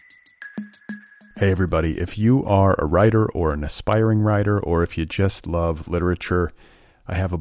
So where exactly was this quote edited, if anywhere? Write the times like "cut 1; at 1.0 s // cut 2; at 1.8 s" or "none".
cut 1; at 0.9 s